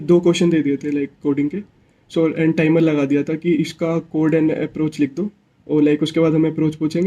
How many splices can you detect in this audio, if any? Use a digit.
0